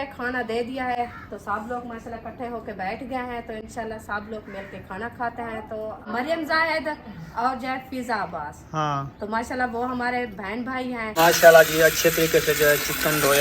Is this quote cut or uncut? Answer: cut